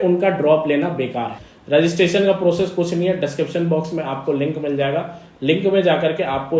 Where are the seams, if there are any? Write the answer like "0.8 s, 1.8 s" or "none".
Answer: 1.3 s